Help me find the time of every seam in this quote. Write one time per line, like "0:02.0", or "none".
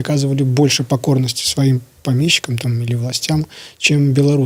none